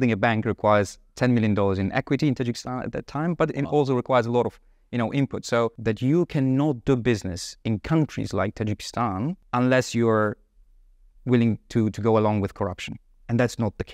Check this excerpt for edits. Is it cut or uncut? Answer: cut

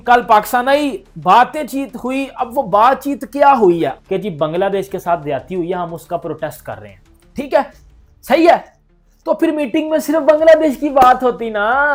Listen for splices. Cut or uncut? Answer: uncut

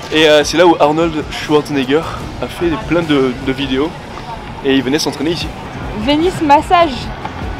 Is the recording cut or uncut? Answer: cut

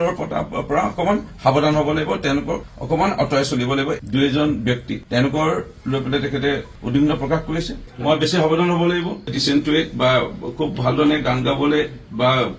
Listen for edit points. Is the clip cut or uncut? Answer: cut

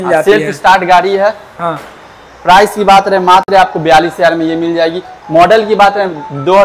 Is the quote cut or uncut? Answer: uncut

